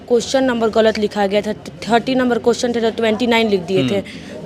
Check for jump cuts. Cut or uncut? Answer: uncut